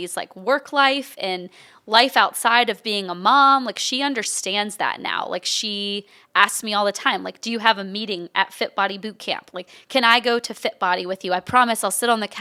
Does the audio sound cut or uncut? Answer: uncut